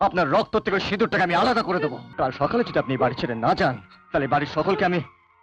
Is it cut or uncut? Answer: cut